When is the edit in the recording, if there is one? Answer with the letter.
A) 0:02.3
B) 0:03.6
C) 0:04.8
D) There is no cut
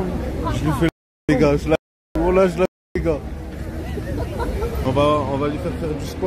C